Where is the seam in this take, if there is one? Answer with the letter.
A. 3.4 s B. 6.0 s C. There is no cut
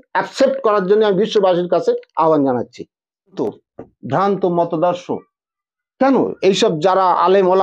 A